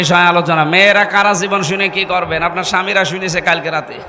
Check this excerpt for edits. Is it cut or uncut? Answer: uncut